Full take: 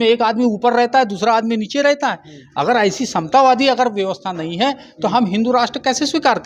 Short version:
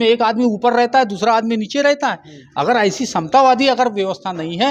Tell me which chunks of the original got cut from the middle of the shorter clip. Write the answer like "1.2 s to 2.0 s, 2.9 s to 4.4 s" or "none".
none